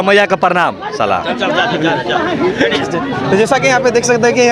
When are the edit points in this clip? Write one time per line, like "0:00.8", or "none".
none